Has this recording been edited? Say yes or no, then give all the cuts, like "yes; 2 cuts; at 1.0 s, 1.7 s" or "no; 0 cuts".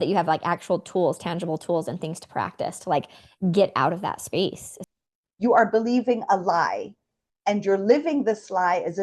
yes; 1 cut; at 4.7 s